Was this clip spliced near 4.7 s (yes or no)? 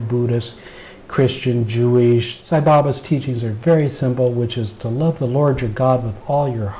no